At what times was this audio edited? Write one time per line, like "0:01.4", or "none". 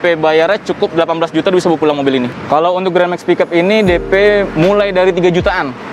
0:02.3